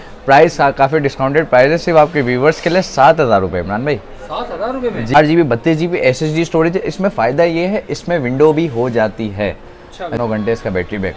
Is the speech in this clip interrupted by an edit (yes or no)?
yes